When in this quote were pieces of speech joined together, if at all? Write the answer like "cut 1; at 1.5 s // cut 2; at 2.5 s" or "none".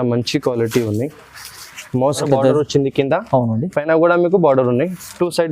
cut 1; at 2.2 s